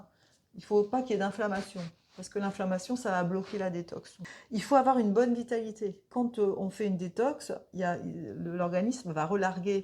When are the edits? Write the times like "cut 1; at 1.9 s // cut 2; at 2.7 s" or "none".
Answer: cut 1; at 4.3 s // cut 2; at 6.1 s

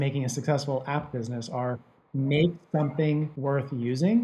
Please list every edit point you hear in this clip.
cut 1; at 3.3 s

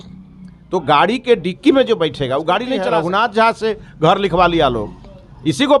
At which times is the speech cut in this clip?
cut 1; at 2.9 s

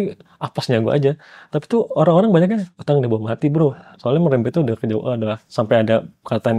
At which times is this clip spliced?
cut 1; at 2.7 s // cut 2; at 3.9 s // cut 3; at 5.4 s

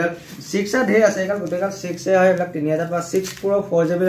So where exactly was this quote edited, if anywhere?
none

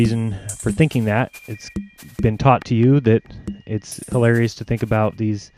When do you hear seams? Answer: cut 1; at 3.8 s

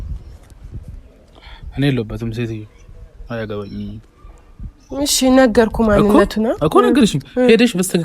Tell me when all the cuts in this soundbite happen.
none

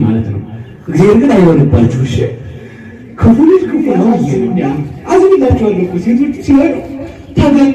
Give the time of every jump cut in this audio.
cut 1; at 4.3 s

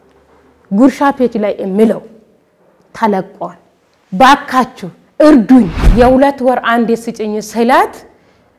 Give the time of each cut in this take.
cut 1; at 5.8 s

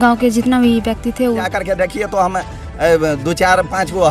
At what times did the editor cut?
cut 1; at 1.5 s

